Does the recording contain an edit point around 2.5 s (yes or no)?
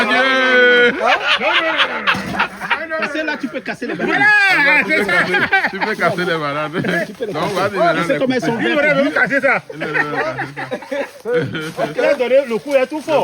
no